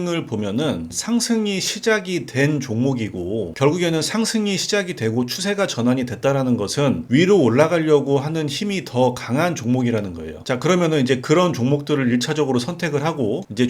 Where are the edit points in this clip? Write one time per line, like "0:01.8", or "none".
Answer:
0:00.9